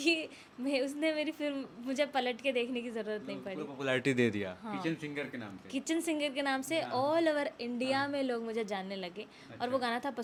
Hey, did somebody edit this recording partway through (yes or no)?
no